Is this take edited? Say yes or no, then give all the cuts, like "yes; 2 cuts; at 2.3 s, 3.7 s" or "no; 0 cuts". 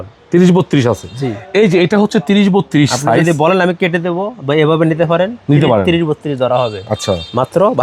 no; 0 cuts